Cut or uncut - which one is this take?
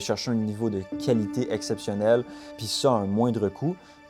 cut